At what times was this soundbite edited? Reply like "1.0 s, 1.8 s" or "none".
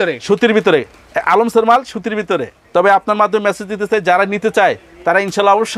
2.6 s